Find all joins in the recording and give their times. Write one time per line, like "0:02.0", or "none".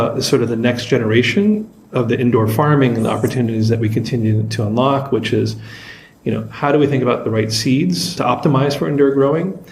0:08.1